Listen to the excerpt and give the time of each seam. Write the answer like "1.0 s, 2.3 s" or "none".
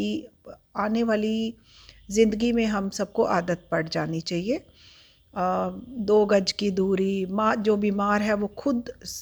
none